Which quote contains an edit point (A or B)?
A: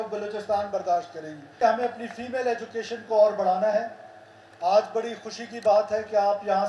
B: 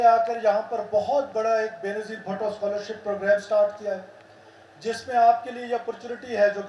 A